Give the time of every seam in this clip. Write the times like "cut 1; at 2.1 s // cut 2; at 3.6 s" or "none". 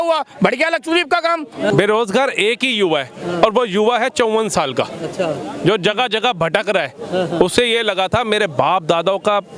cut 1; at 1.7 s